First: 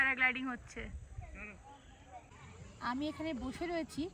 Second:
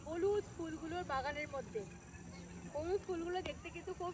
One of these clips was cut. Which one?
first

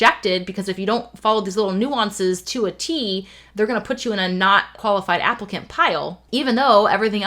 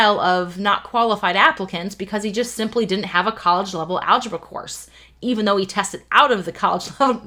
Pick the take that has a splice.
first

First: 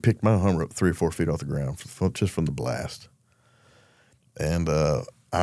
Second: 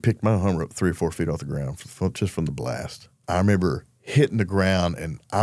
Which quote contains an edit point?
second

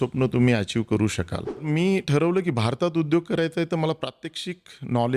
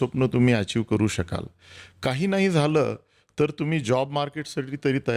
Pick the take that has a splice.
first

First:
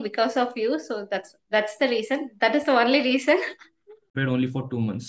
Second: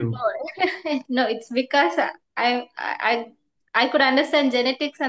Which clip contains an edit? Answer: first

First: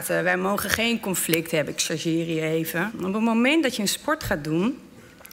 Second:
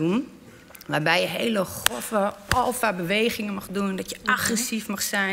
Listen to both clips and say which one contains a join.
first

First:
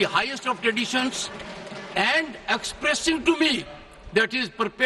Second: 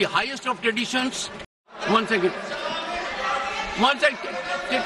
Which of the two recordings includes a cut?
second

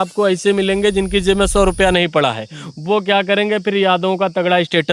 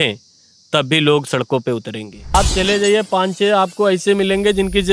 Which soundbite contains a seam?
second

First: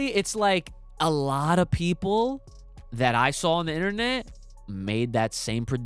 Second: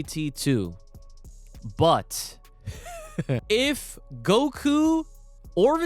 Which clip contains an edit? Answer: second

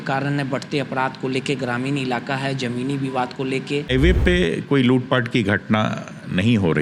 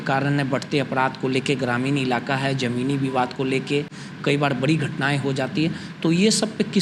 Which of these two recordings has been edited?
first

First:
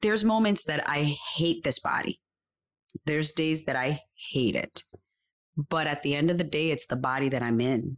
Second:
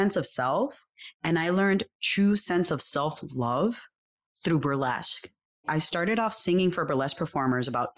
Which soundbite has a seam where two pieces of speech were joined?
second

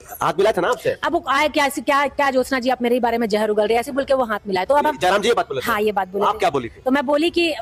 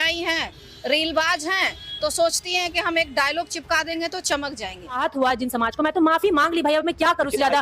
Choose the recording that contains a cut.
second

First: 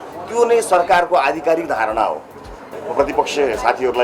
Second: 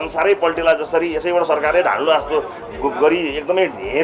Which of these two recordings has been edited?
first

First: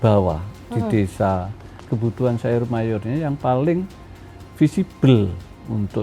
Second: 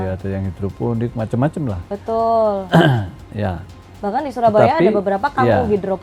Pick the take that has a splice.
first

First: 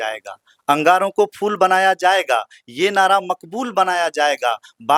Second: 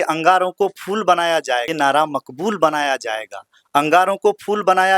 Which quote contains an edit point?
second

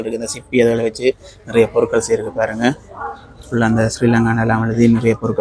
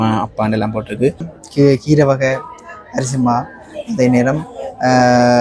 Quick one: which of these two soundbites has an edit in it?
second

